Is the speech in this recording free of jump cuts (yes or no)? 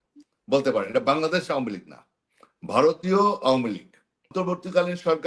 no